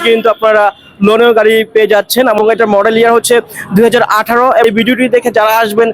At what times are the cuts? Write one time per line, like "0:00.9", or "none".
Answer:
0:02.4
0:04.6